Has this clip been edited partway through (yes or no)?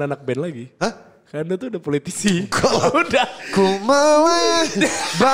no